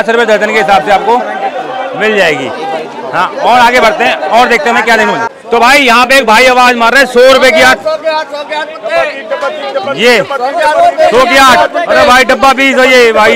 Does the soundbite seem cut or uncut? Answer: uncut